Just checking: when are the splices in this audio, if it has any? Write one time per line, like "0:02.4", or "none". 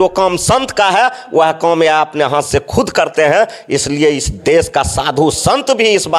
none